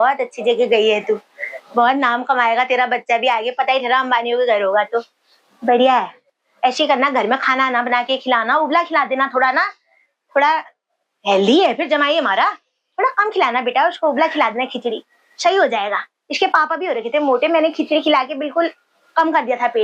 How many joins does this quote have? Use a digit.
0